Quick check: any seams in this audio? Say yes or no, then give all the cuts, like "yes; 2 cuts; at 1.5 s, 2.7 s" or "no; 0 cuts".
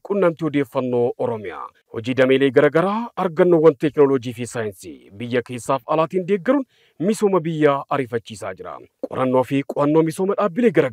yes; 1 cut; at 1.5 s